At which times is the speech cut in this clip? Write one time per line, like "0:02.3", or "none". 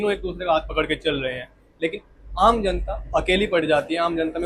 none